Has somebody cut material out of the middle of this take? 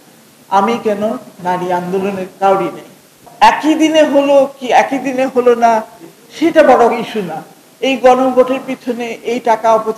yes; 1 cut; at 3.3 s

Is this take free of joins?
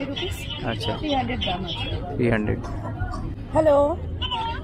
no; 1 cut; at 3.4 s

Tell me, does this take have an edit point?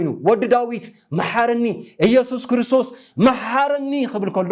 no; 0 cuts

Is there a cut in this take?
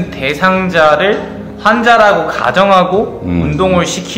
no; 0 cuts

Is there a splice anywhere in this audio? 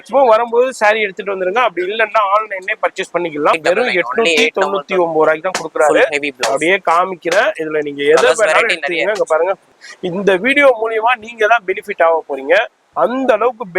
yes; 2 cuts; at 3.6 s, 9.7 s

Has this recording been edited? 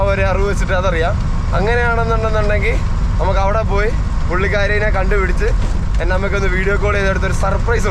no; 0 cuts

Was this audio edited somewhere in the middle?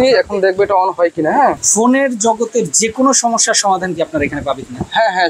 yes; 1 cut; at 1.6 s

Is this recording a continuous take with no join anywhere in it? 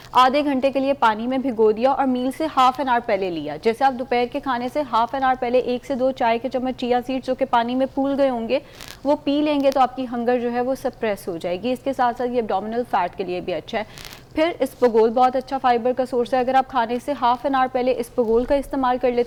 yes; 0 cuts

